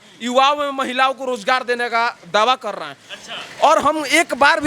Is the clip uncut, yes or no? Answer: yes